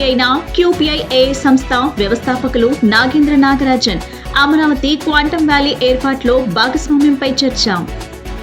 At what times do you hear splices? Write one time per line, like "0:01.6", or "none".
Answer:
none

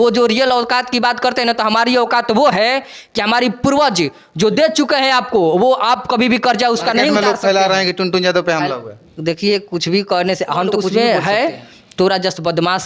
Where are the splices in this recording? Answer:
0:07.1
0:10.9

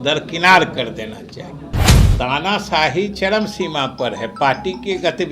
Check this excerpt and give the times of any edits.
0:01.9

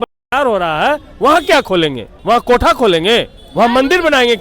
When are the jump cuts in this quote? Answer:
0:02.1
0:03.4

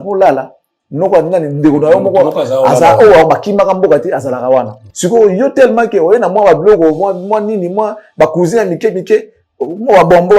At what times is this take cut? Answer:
0:04.8

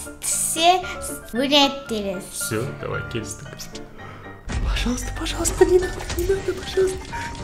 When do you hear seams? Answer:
0:01.3
0:03.7

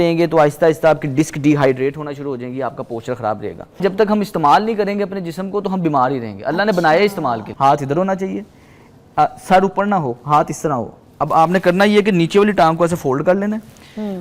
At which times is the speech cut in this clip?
0:03.8
0:07.5

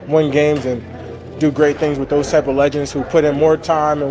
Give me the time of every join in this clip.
none

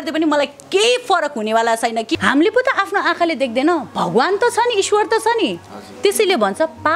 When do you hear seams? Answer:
0:02.1

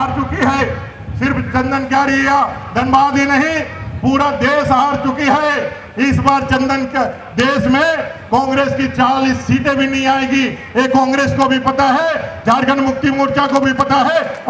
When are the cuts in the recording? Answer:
none

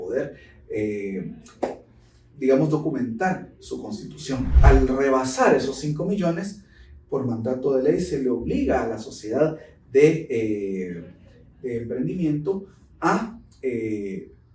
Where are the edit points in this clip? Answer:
0:04.5

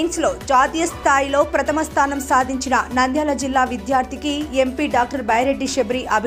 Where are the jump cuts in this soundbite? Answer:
none

